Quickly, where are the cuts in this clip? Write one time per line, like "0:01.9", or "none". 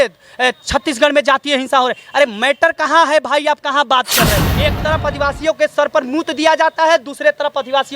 0:04.5